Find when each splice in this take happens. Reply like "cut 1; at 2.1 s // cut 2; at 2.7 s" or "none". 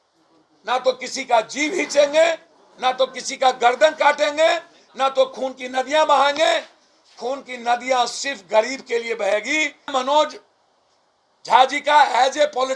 cut 1; at 9.9 s